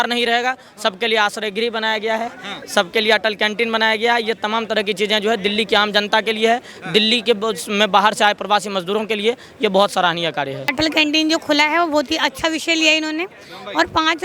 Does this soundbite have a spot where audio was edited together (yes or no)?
no